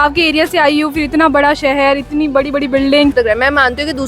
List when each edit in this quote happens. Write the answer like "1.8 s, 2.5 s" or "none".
3.1 s

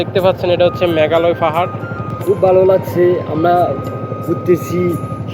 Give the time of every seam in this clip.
2.1 s

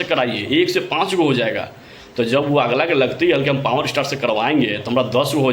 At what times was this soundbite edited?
none

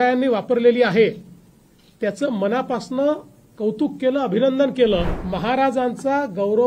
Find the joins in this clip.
5.2 s

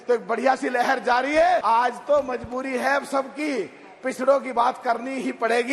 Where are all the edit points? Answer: 1.6 s

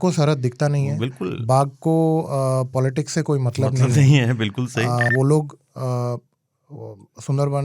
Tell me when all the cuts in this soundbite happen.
5.1 s

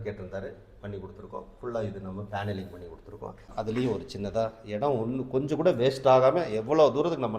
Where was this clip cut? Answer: 3.5 s

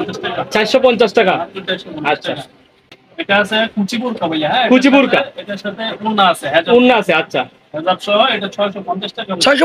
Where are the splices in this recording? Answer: 3.0 s

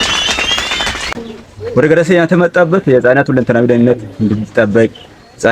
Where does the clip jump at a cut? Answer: 1.1 s

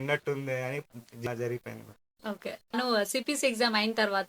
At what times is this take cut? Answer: 1.3 s

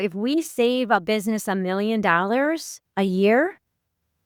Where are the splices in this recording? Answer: none

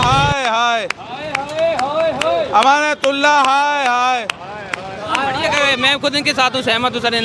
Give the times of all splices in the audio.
5.5 s

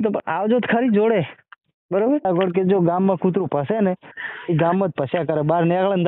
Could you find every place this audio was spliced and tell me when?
2.2 s

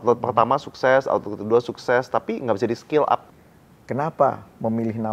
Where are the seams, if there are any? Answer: 3.3 s

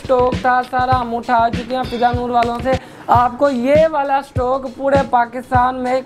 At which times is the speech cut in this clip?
none

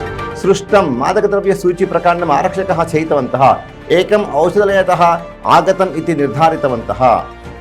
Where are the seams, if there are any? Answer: none

